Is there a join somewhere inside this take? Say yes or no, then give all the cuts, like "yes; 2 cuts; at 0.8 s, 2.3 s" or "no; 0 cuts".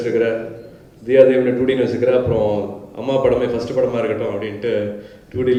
no; 0 cuts